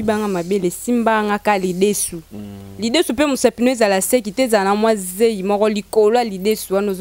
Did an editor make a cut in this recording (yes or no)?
no